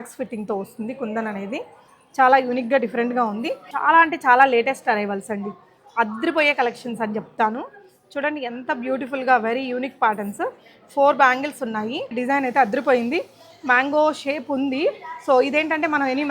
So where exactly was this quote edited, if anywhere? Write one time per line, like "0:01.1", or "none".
0:03.7
0:12.1